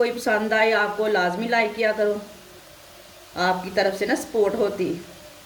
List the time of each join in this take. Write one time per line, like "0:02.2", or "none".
none